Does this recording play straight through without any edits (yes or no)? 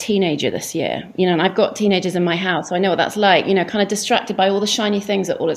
yes